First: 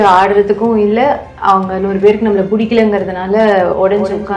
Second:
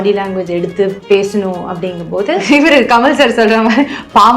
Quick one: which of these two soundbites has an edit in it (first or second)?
second